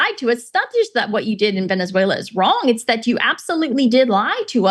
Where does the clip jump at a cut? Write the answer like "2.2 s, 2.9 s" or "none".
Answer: none

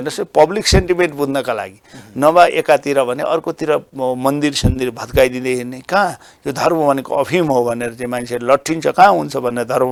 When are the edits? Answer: none

